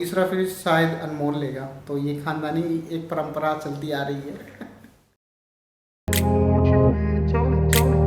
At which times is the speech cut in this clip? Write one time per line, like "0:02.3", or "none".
0:04.6